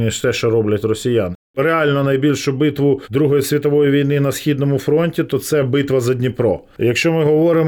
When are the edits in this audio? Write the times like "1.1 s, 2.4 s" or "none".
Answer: 1.5 s, 3.1 s, 6.7 s